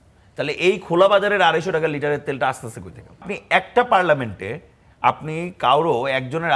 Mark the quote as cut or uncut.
cut